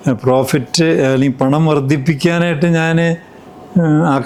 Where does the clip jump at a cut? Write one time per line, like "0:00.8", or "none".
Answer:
none